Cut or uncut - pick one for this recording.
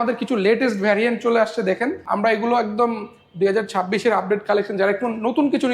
cut